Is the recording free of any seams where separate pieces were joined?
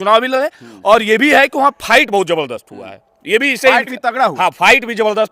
yes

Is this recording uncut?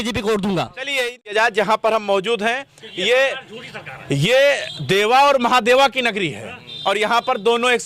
no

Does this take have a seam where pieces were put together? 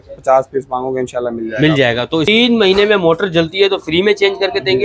yes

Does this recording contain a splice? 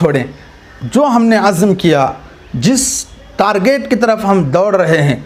no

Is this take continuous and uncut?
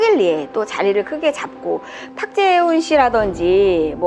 no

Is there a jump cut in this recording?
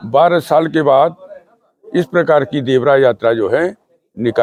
no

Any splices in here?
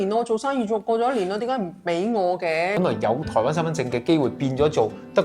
yes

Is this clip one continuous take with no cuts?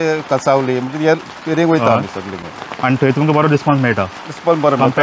yes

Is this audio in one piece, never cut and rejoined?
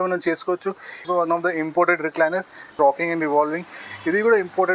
no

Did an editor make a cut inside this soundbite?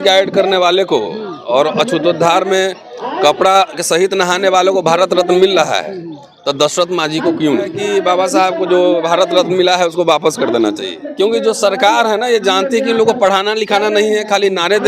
yes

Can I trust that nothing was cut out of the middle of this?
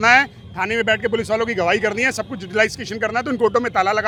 yes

